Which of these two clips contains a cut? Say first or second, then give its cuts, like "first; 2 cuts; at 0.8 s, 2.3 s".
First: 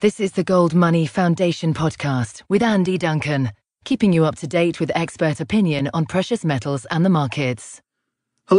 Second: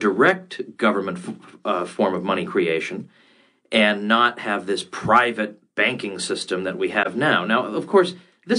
second; 1 cut; at 6.9 s